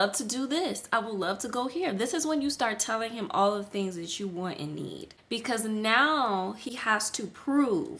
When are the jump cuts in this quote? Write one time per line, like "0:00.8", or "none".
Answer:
0:05.1
0:06.7